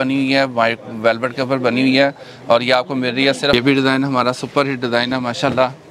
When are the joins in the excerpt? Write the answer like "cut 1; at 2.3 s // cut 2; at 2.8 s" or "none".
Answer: cut 1; at 3.5 s